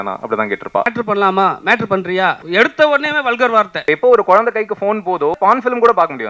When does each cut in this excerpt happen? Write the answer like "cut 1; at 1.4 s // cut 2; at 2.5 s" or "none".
cut 1; at 0.9 s // cut 2; at 2.4 s // cut 3; at 3.8 s // cut 4; at 5.3 s